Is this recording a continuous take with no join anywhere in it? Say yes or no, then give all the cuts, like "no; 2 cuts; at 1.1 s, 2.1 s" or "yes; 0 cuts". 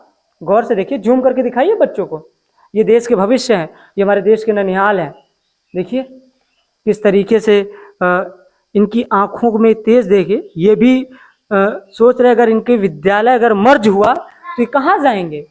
yes; 0 cuts